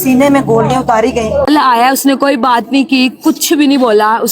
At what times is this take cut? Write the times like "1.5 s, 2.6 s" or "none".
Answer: 1.5 s